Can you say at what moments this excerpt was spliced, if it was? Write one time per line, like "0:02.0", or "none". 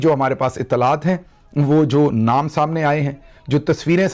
none